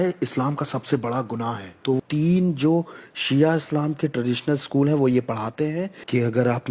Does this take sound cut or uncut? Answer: cut